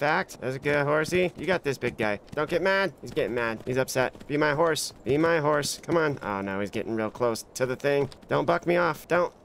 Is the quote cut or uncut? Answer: uncut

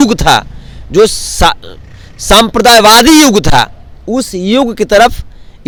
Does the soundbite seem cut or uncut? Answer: uncut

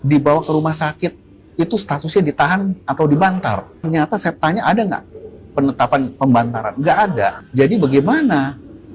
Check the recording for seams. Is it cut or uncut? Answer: cut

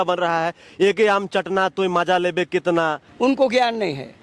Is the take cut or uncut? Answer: cut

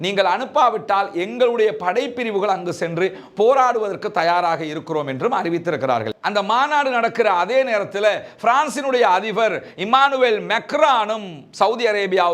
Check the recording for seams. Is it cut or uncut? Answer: cut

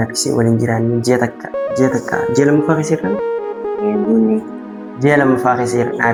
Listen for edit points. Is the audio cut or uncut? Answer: uncut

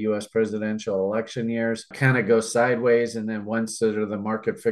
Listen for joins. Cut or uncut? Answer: uncut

